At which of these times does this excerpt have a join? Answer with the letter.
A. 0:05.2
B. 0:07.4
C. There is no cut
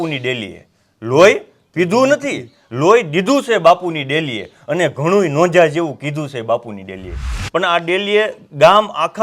B